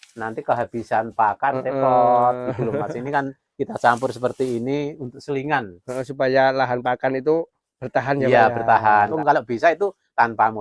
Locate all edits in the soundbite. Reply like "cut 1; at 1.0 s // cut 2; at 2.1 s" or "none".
cut 1; at 9.1 s